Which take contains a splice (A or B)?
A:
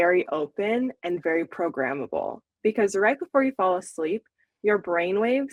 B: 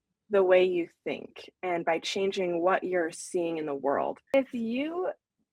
B